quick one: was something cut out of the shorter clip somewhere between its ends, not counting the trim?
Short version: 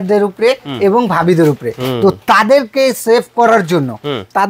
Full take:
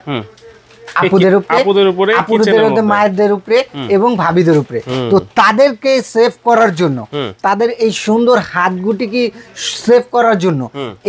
no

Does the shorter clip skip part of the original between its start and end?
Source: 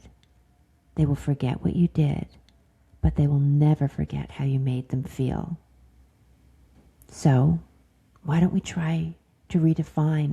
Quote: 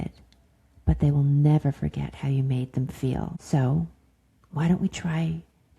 yes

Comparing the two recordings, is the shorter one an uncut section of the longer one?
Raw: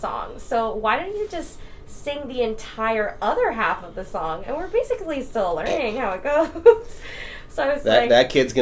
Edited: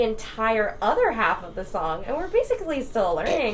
yes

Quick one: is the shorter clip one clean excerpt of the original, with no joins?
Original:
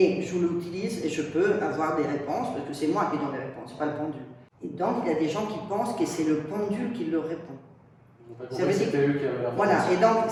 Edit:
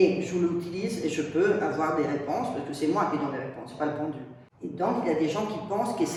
yes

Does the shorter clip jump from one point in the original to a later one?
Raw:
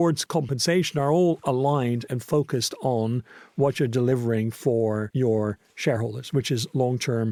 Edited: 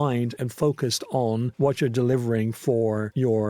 yes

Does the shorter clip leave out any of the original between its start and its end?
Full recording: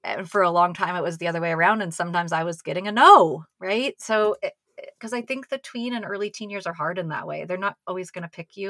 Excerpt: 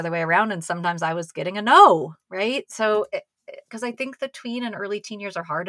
no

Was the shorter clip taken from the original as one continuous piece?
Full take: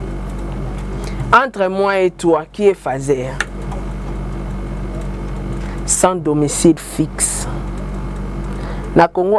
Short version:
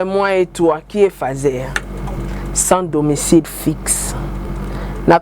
no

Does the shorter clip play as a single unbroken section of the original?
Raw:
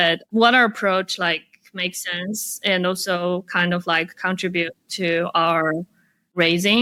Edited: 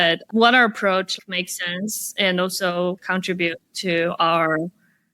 no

